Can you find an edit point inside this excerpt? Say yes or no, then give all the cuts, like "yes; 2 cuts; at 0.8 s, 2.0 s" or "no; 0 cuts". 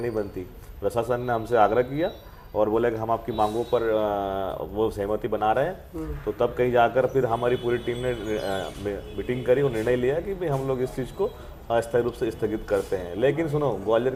no; 0 cuts